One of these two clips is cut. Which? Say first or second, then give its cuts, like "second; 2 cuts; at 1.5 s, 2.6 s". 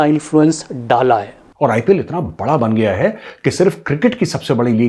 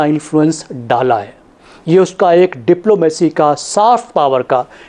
first; 1 cut; at 1.4 s